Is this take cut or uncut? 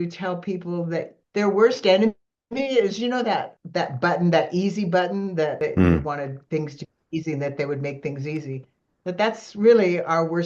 cut